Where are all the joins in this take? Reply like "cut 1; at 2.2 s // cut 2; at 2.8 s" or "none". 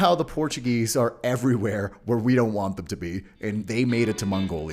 cut 1; at 3.6 s